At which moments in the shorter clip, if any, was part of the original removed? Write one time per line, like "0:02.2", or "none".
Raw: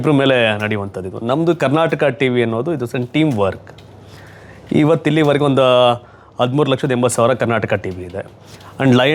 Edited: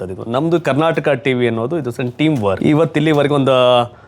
0:02.6